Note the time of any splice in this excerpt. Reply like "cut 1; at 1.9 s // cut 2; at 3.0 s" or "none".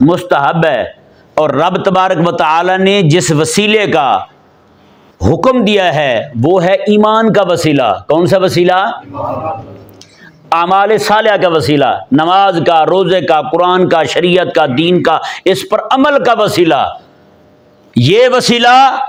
none